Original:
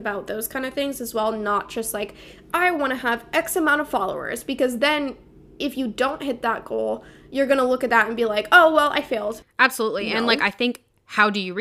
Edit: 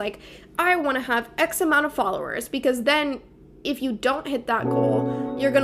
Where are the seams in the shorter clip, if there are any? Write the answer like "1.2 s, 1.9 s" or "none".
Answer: none